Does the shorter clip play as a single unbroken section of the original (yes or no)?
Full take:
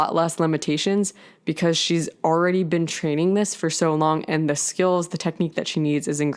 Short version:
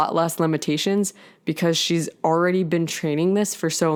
yes